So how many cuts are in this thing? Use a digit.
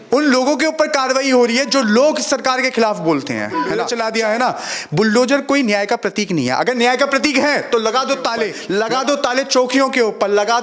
2